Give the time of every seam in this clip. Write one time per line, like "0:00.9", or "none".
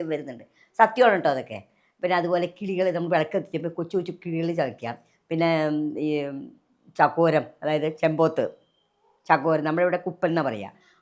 none